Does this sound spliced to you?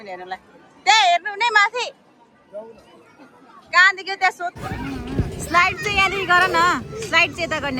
yes; 1 cut; at 4.6 s

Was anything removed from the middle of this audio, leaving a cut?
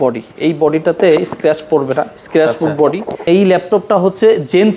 yes; 1 cut; at 3.2 s

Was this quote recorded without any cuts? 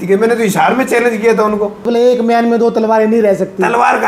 no; 1 cut; at 1.8 s

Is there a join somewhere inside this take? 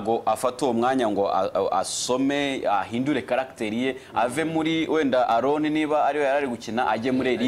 no; 0 cuts

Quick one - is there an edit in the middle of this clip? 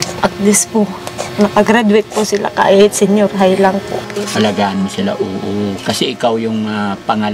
yes; 1 cut; at 4.0 s

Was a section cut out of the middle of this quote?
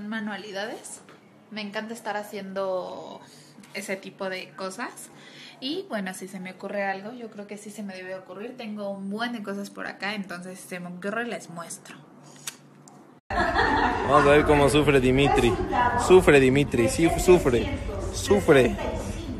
no; 0 cuts

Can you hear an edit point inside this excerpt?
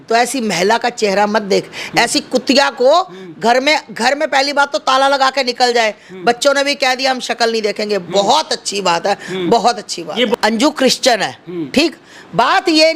no; 0 cuts

